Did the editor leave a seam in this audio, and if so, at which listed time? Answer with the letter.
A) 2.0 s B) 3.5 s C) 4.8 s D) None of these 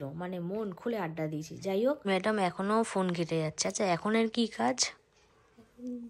A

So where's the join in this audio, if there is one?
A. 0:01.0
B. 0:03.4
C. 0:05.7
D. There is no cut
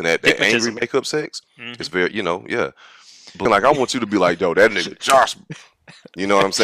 B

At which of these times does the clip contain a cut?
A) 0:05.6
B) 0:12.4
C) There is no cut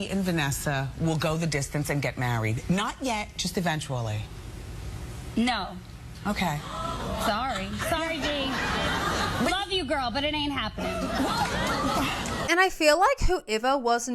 B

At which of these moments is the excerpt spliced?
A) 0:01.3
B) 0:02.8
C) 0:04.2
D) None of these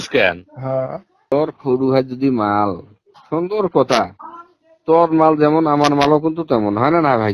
A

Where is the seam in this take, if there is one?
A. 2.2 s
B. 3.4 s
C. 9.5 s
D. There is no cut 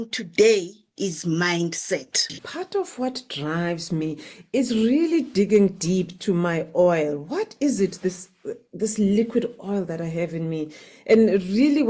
A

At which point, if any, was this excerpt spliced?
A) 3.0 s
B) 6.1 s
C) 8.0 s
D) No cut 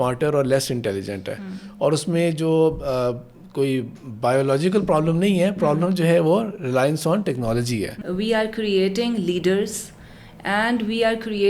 C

